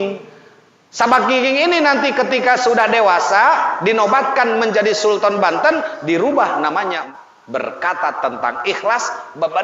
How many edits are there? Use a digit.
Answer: 1